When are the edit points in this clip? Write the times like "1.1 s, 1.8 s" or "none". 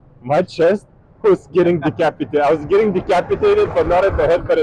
none